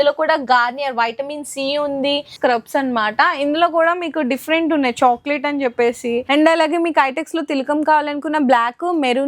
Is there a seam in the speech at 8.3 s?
no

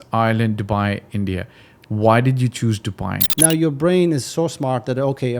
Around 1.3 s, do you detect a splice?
no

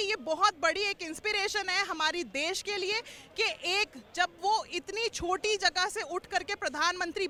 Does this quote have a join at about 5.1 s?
no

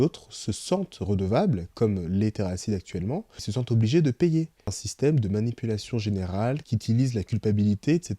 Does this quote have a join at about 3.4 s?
yes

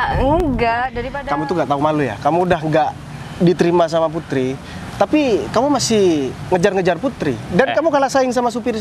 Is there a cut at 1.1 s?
yes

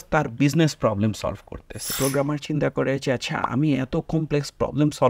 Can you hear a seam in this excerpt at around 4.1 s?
no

